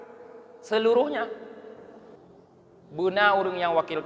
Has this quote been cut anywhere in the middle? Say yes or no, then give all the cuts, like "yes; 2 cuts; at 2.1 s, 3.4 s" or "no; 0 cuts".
yes; 1 cut; at 2.0 s